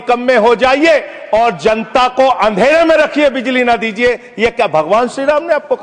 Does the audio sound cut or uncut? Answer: uncut